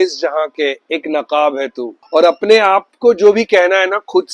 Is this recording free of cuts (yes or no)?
no